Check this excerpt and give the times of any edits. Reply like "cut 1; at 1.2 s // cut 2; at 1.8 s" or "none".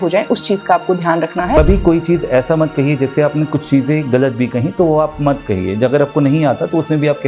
cut 1; at 1.6 s

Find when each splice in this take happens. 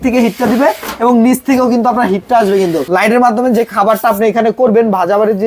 cut 1; at 2.8 s

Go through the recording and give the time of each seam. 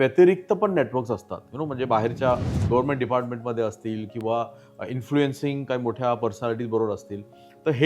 none

